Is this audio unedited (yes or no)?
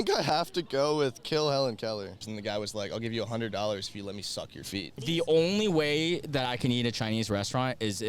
no